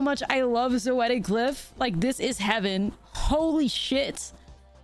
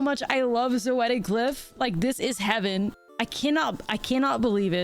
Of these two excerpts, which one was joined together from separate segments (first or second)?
second